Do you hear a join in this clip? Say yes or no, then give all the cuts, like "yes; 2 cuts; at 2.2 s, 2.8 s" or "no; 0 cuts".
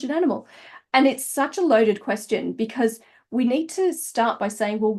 no; 0 cuts